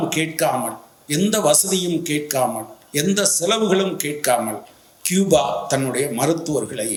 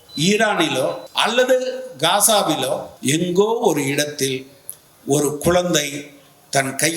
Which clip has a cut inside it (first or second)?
second